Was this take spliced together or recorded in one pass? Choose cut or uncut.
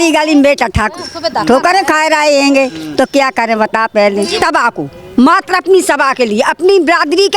cut